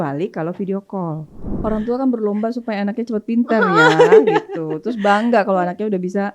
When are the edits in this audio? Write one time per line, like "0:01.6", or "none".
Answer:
0:01.5